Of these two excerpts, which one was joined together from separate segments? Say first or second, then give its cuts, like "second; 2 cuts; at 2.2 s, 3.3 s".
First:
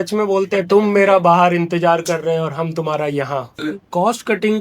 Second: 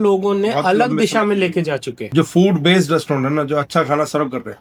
first; 1 cut; at 3.6 s